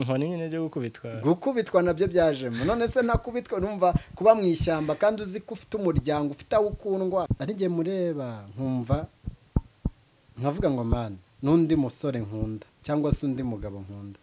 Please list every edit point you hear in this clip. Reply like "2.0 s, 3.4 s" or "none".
7.3 s

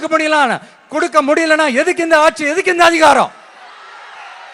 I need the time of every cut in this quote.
none

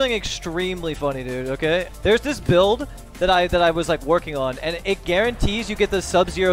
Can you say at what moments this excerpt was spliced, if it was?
1.9 s, 4.8 s

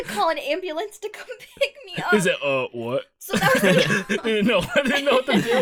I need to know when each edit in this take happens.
none

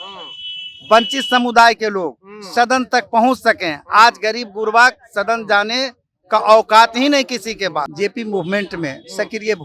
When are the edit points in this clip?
7.9 s

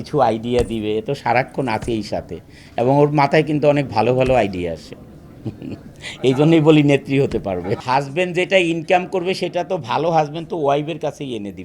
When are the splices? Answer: 7.8 s

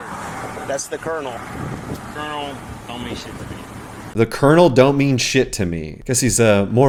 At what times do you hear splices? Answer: none

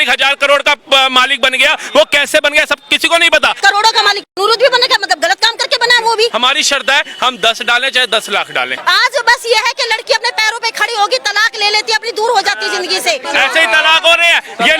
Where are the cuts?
3.6 s, 6.3 s, 8.7 s, 13.3 s

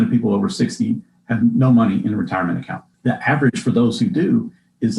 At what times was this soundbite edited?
none

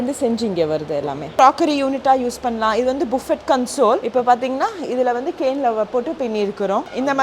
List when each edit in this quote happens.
1.3 s

